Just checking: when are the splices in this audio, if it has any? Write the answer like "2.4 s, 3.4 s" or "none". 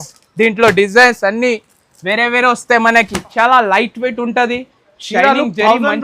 3.3 s